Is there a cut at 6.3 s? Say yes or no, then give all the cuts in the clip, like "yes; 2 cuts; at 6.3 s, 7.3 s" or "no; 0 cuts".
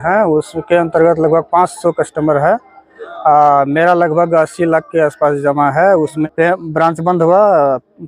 yes; 1 cut; at 6.3 s